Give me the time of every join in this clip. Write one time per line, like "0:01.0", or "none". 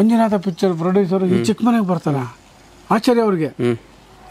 none